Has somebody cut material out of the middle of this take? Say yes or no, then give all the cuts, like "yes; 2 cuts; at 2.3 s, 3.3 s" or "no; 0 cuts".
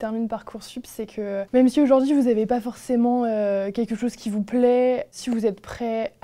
no; 0 cuts